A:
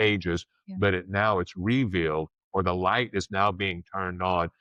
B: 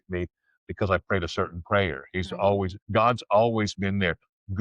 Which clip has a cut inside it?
B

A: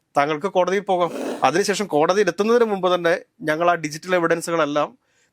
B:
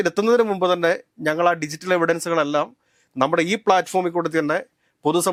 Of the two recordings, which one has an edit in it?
A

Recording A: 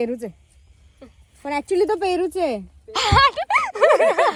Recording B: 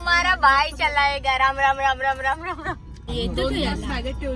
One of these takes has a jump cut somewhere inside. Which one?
B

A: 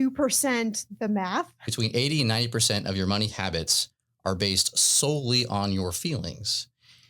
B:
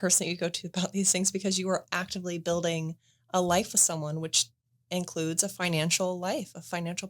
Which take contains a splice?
A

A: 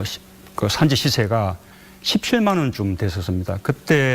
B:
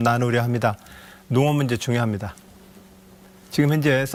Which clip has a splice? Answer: A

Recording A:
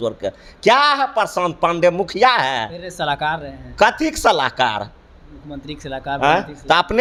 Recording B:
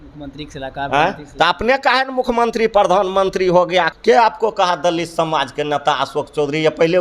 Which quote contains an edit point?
B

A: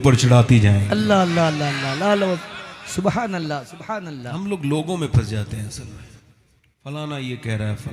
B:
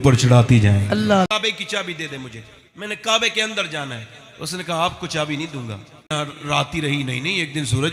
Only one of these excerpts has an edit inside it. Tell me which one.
B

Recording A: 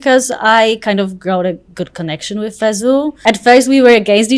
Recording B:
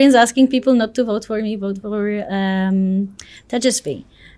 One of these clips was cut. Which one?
A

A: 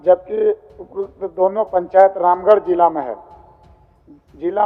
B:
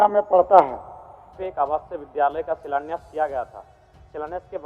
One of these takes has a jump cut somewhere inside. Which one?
B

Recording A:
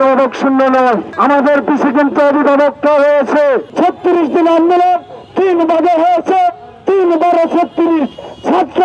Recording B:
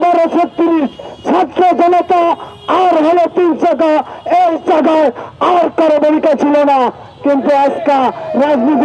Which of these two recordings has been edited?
A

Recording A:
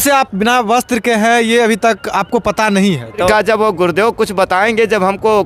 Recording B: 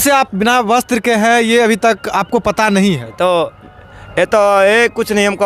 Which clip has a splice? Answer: A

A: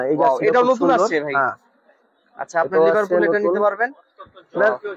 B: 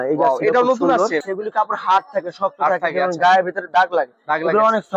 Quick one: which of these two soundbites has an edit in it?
B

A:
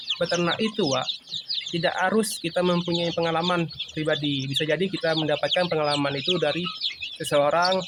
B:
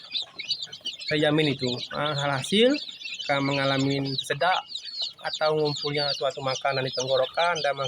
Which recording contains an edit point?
B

